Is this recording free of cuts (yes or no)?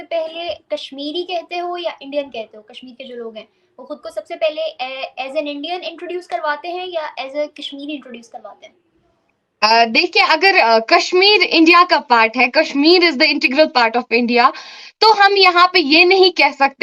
yes